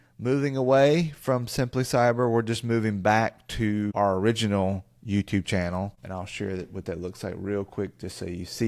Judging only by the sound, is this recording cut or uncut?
cut